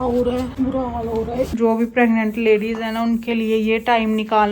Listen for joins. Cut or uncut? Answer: cut